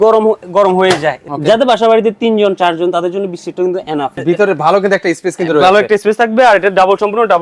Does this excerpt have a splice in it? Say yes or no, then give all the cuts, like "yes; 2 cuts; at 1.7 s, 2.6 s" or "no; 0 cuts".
yes; 2 cuts; at 1.2 s, 4.1 s